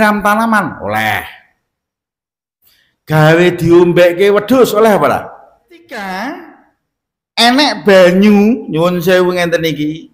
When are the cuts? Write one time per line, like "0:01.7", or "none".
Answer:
0:05.9